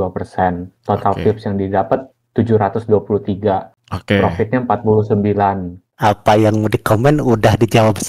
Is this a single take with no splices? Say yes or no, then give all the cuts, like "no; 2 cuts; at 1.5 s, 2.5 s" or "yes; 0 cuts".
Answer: no; 1 cut; at 5.8 s